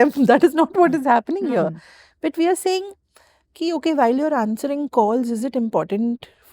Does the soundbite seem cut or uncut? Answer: uncut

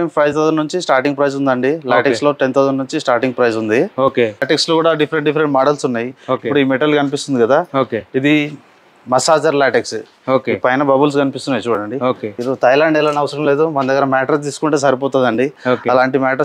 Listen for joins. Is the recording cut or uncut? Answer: cut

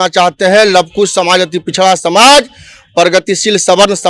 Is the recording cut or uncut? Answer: uncut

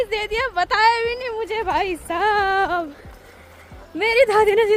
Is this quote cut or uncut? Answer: uncut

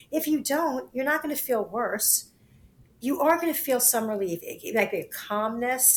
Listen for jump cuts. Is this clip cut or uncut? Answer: uncut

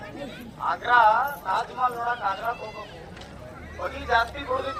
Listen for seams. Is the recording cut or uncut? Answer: uncut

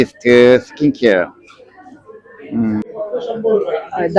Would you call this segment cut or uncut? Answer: cut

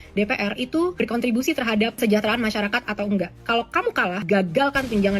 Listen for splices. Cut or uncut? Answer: uncut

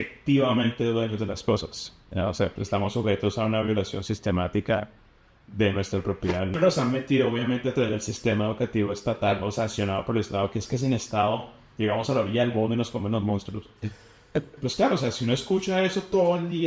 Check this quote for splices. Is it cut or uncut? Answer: cut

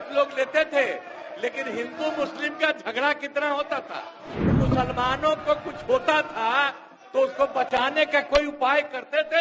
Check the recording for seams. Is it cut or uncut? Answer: cut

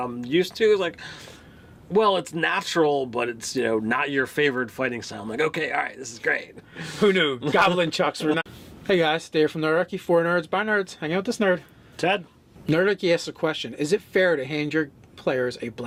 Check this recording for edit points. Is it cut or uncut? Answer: uncut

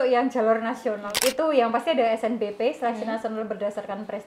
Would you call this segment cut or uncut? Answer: cut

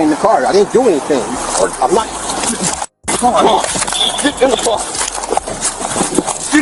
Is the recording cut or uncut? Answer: uncut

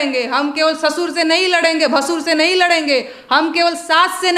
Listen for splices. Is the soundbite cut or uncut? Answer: uncut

